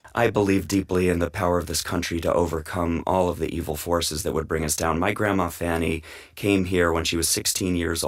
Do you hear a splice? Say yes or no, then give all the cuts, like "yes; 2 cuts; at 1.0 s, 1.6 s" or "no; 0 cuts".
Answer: no; 0 cuts